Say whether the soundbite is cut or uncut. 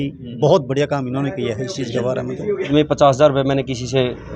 cut